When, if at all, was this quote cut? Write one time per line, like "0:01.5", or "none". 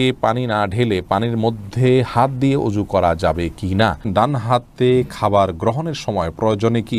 0:04.0